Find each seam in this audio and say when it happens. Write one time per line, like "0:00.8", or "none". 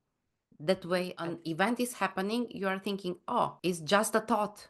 0:01.3